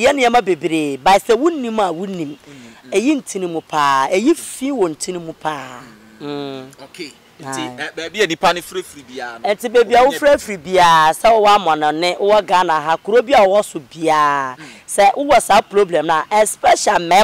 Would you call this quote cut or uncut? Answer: uncut